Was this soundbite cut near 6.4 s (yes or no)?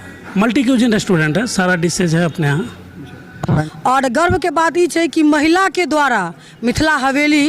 no